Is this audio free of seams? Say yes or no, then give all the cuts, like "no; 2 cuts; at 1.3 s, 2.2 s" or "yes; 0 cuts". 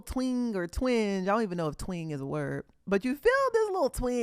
yes; 0 cuts